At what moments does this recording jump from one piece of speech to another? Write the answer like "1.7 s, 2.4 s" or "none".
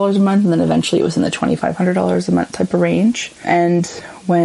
none